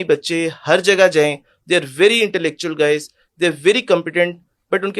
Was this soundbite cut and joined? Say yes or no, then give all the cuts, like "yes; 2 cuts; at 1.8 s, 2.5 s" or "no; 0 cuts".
no; 0 cuts